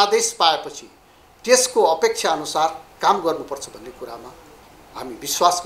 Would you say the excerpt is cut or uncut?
uncut